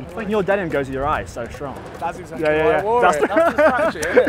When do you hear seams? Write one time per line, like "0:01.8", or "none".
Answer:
0:03.2